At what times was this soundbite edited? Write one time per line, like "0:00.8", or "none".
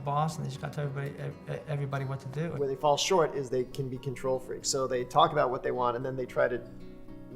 0:02.5